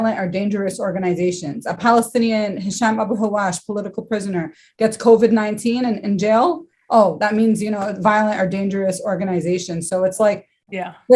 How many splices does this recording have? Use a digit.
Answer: 0